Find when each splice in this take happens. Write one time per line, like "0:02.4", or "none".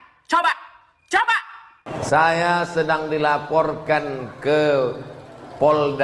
0:01.8